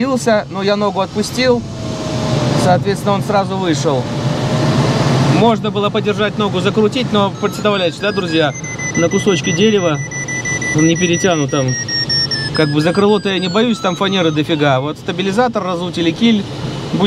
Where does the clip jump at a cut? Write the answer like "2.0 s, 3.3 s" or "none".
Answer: none